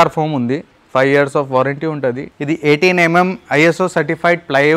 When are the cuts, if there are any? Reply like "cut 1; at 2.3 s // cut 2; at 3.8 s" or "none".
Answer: cut 1; at 2.3 s